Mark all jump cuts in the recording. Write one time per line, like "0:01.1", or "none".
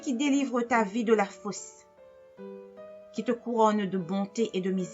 0:01.6
0:03.1